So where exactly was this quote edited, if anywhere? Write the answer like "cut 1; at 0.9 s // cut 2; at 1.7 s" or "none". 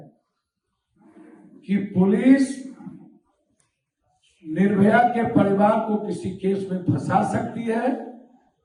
none